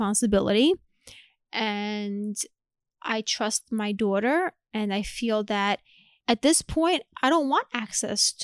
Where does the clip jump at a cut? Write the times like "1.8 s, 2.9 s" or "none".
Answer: 6.1 s